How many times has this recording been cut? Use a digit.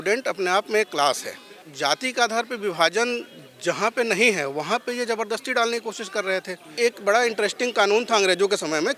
2